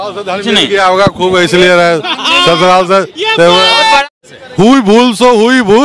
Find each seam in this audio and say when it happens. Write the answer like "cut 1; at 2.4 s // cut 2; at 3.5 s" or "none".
cut 1; at 4.1 s